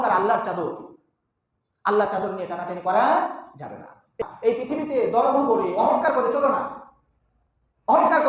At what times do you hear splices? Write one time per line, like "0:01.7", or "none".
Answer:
0:04.1